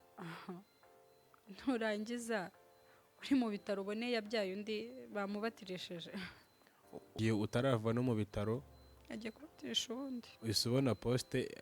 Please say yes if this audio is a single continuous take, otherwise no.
no